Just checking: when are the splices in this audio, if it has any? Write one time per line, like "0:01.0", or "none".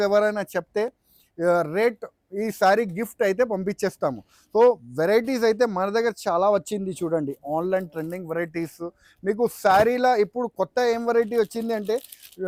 none

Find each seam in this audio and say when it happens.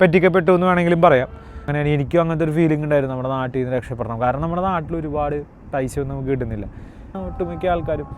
0:01.7
0:07.2

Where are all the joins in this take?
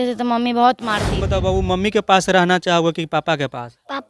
0:01.2

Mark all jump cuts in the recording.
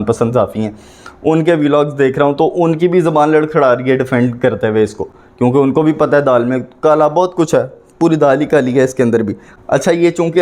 none

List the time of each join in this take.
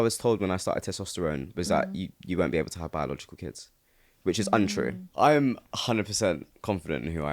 0:05.0
0:05.7

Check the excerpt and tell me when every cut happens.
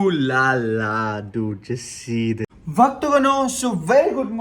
0:02.5

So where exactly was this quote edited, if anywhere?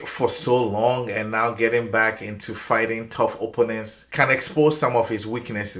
0:04.0

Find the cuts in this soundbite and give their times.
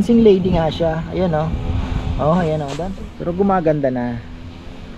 0:02.7

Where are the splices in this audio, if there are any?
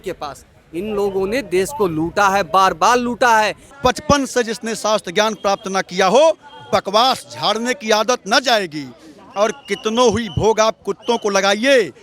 0:03.6

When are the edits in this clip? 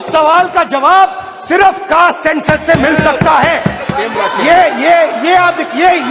0:03.9

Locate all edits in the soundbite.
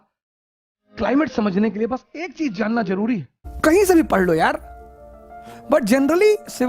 0:03.5

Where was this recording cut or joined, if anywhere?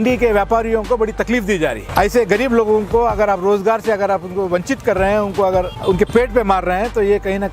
0:01.8
0:05.7

